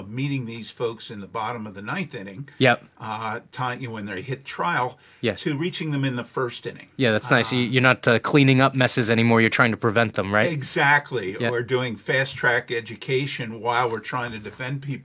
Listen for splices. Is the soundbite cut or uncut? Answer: uncut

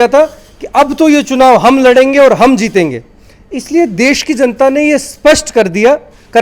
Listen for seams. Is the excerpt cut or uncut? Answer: uncut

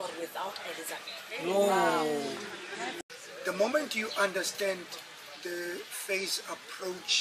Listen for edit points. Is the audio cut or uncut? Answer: cut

